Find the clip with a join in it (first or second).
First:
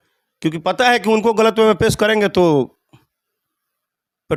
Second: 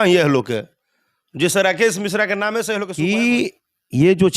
second